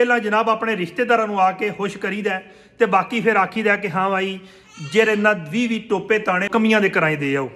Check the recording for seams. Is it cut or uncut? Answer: cut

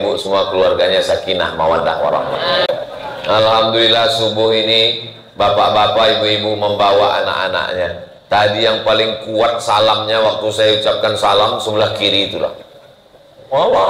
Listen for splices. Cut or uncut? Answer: cut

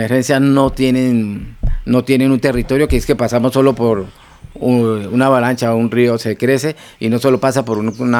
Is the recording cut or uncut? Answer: uncut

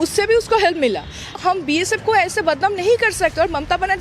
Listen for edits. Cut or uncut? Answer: cut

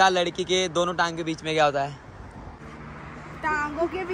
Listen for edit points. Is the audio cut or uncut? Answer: cut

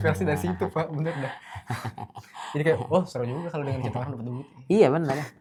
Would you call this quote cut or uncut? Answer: uncut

